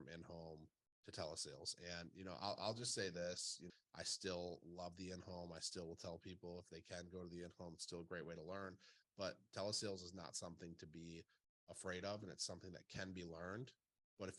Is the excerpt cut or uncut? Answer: uncut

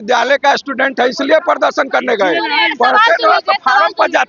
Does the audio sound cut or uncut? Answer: uncut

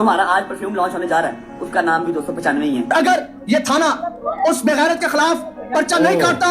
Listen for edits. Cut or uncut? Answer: cut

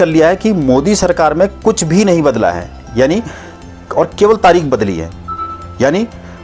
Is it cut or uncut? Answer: uncut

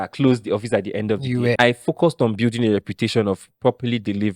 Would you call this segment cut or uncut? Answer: cut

